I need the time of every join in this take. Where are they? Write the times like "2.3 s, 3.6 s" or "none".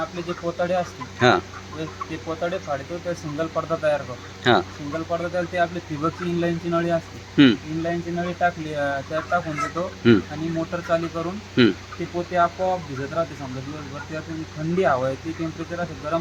none